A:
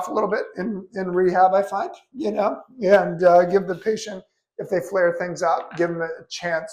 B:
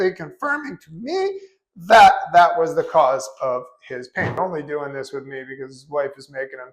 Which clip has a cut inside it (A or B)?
B